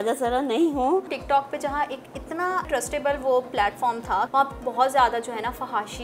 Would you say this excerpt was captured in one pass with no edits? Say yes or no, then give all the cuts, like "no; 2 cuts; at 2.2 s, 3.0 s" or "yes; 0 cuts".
no; 3 cuts; at 1.1 s, 2.7 s, 4.3 s